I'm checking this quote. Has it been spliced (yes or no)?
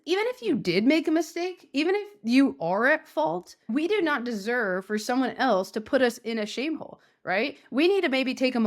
yes